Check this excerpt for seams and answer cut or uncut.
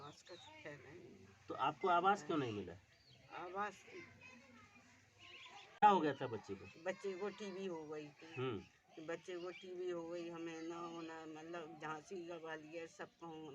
cut